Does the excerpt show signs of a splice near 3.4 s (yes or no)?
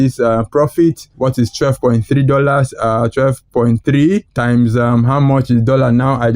no